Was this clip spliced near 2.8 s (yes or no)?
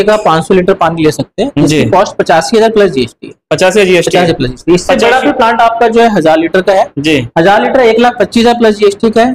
no